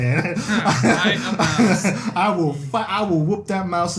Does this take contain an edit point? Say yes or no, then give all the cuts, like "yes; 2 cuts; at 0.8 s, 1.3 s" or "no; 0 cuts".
no; 0 cuts